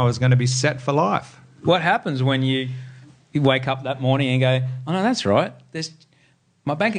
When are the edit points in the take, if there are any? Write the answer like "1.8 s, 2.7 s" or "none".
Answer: none